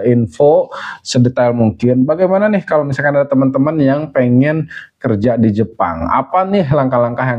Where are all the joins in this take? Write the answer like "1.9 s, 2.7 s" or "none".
none